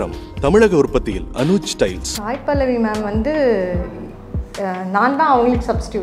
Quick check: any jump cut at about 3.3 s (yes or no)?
no